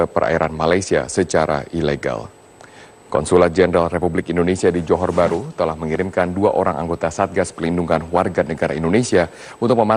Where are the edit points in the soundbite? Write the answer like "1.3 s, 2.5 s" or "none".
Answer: none